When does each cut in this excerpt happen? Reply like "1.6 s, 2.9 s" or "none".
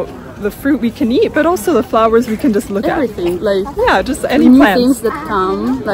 none